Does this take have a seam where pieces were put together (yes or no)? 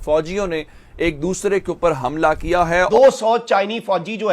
yes